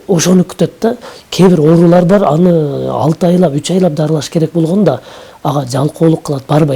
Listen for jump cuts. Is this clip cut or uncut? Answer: uncut